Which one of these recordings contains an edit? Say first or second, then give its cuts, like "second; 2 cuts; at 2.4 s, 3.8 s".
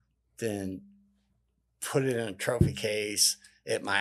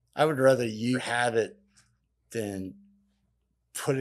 second; 1 cut; at 1.0 s